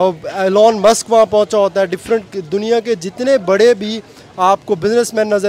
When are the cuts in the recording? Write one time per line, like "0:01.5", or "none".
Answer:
none